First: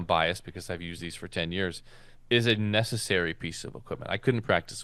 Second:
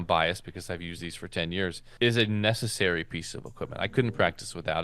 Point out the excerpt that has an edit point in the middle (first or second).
second